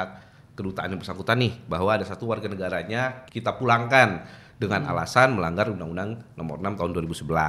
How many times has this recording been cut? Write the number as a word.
one